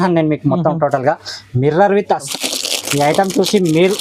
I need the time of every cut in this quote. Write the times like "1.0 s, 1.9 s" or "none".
2.3 s